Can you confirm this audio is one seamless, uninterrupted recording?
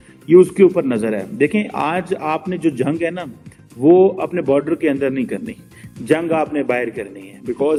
yes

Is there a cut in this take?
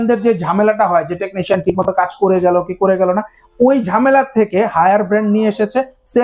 no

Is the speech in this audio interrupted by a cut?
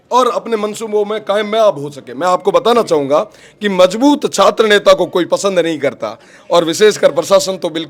no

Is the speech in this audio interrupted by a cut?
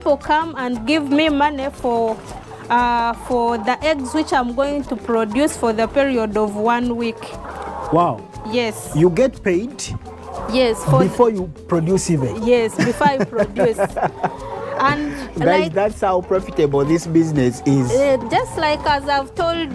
no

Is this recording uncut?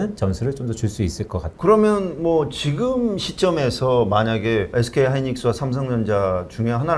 no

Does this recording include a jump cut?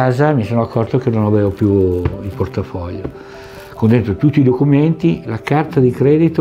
no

